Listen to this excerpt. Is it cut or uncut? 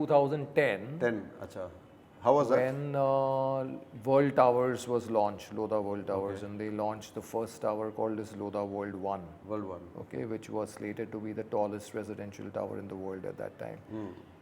uncut